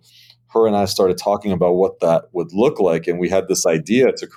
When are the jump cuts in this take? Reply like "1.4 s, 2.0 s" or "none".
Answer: none